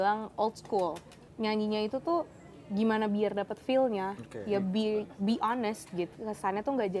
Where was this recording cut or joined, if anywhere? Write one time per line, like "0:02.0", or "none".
0:01.2
0:06.1